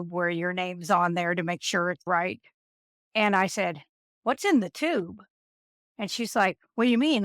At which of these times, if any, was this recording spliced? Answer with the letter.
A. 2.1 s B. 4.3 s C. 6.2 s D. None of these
A